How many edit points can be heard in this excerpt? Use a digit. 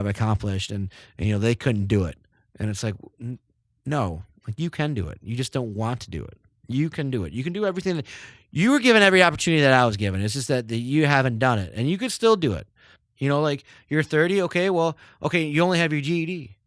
1